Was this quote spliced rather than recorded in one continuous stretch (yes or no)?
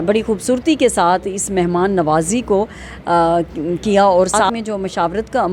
no